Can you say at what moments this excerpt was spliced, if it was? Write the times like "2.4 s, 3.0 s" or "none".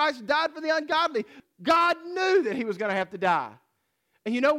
1.3 s